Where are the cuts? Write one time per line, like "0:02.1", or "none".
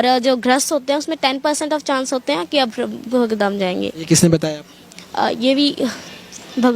none

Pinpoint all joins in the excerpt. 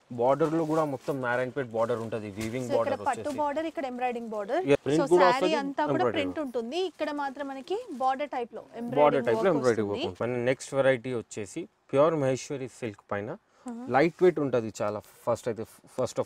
0:04.8
0:10.1

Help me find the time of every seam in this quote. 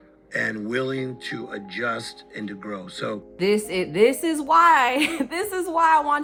none

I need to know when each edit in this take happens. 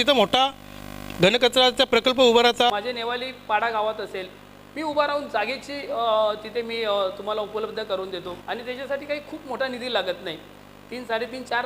0:02.7
0:08.4

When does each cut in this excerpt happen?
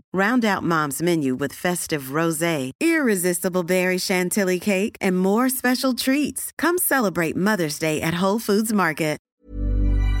0:09.3

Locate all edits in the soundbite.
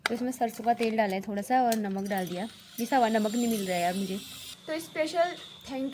none

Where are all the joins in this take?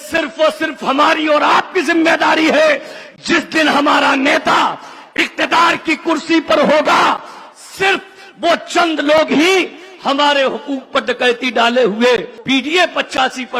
0:12.3

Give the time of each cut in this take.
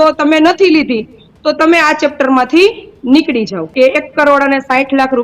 0:03.7

